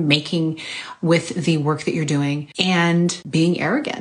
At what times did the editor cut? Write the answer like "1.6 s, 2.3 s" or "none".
2.5 s, 3.2 s

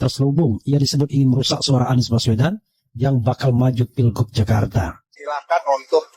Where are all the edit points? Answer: 5.1 s

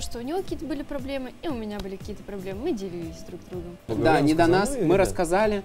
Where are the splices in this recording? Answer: 3.9 s

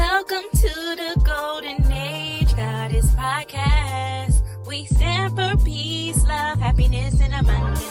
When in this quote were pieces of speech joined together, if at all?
none

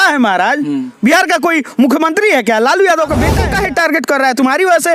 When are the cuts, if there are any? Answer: 3.4 s

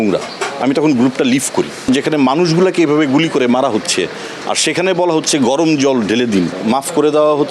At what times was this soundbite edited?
1.8 s, 6.5 s

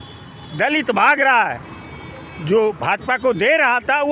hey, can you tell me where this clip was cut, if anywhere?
none

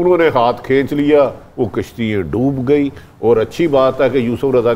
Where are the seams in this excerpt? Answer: none

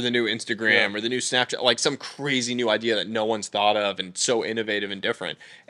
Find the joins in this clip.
none

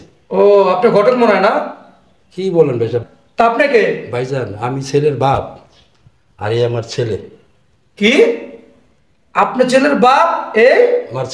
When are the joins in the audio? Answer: none

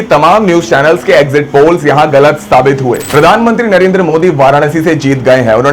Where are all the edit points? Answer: 3.0 s

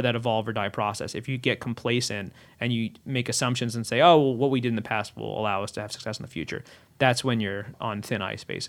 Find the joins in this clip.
none

